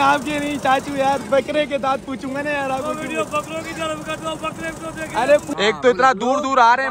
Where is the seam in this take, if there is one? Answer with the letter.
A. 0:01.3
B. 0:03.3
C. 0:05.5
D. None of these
C